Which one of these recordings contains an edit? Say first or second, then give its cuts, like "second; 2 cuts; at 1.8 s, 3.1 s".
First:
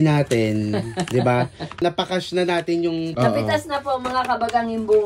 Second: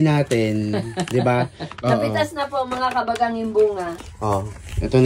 second; 2 cuts; at 1.7 s, 3.9 s